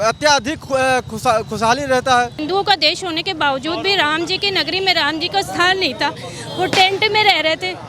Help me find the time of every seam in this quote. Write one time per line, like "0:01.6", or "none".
0:02.4